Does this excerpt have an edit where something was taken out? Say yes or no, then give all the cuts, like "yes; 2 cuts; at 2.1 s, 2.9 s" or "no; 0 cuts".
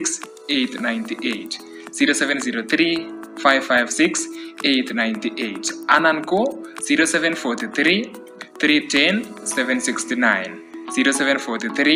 no; 0 cuts